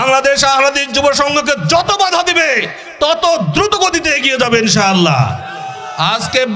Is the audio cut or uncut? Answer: uncut